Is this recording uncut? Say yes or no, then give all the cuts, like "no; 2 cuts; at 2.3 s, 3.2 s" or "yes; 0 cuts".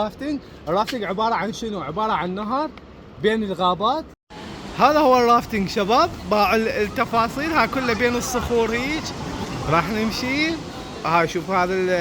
no; 1 cut; at 4.2 s